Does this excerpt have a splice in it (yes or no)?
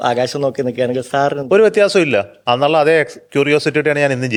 no